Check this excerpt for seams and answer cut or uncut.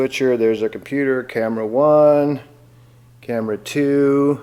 uncut